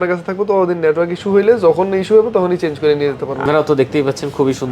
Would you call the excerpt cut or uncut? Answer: cut